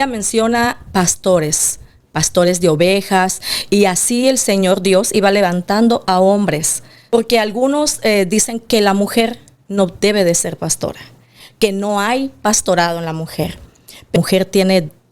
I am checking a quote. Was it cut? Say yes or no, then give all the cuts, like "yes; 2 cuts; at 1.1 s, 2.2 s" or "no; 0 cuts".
yes; 2 cuts; at 7.1 s, 14.2 s